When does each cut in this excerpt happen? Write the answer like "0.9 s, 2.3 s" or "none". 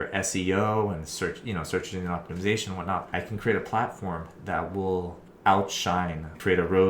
3.1 s, 5.2 s